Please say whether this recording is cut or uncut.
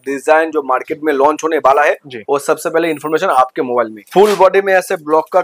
cut